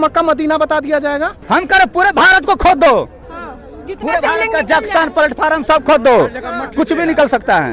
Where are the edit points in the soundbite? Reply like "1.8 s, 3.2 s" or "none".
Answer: 1.4 s